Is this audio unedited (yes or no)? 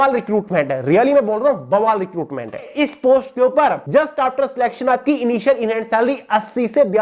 no